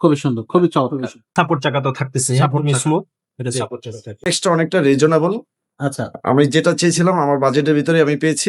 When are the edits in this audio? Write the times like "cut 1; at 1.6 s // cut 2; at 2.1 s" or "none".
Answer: cut 1; at 1.2 s // cut 2; at 4.3 s